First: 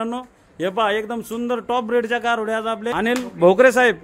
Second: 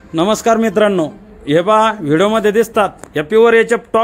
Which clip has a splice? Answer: first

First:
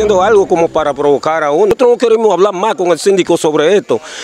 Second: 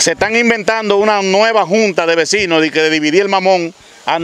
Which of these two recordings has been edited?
first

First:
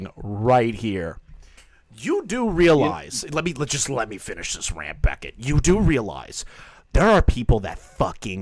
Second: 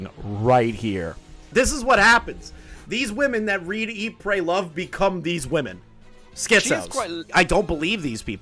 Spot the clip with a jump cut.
second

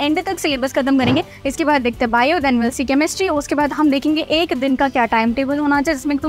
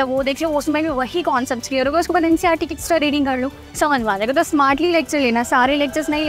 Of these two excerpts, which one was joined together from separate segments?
first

